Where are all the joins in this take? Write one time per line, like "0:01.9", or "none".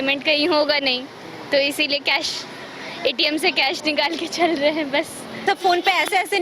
0:05.4